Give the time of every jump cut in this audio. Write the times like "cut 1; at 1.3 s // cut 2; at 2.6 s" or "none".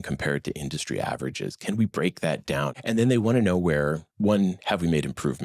cut 1; at 2.7 s

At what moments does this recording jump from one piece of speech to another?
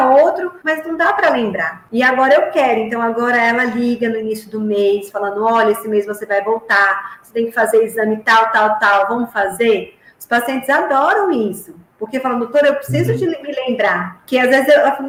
none

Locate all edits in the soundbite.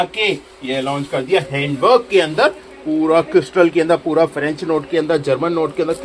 none

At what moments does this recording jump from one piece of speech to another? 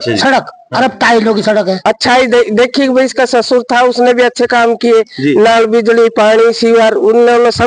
cut 1; at 1.8 s

